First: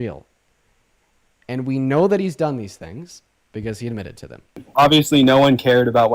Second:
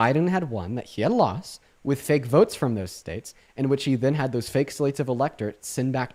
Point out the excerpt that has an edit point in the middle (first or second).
first